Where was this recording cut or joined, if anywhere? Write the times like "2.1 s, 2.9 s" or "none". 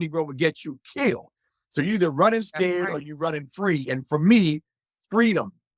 none